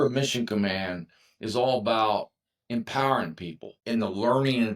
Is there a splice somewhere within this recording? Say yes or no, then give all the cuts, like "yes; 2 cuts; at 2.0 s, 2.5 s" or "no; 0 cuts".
yes; 1 cut; at 3.7 s